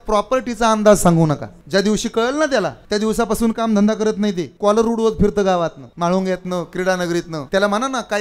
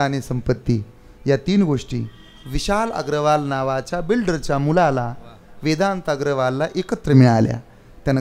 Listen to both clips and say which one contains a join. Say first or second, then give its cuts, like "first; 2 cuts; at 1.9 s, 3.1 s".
first; 5 cuts; at 1.5 s, 2.8 s, 4.5 s, 5.8 s, 7.4 s